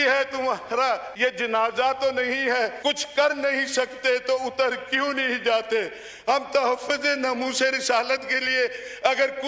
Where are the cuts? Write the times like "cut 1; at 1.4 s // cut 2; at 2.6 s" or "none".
cut 1; at 1.1 s // cut 2; at 2.8 s